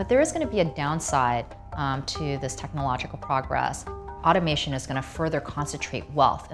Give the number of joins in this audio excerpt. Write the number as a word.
zero